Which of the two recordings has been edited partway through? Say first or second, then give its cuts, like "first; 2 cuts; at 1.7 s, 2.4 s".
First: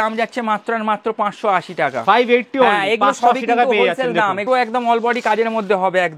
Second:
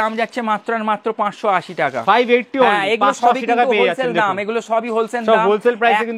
first; 1 cut; at 4.4 s